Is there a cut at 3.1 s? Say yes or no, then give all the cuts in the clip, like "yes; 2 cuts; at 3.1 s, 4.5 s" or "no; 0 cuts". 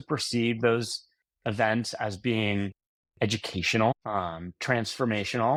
no; 0 cuts